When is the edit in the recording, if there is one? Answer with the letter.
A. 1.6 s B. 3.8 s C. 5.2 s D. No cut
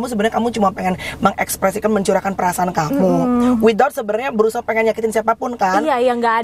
D